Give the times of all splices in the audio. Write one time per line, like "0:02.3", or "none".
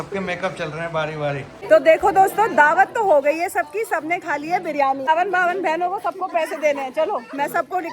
0:01.6
0:05.1